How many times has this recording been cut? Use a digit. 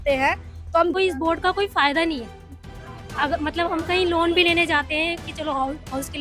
1